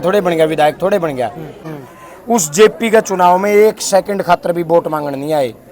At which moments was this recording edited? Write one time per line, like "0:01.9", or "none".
0:01.7